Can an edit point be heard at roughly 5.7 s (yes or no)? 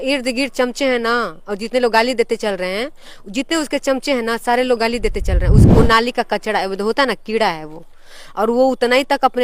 yes